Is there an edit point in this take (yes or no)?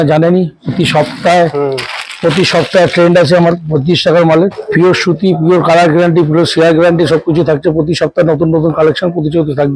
yes